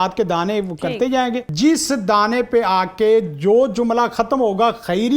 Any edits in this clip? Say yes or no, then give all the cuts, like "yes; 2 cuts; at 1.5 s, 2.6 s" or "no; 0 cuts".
yes; 1 cut; at 1.5 s